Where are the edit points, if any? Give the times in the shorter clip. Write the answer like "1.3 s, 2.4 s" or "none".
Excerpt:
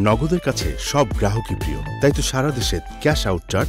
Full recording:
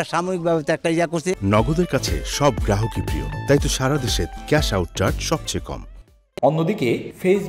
none